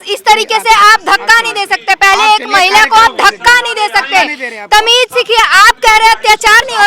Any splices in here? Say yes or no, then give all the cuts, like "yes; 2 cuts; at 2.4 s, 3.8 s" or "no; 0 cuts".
no; 0 cuts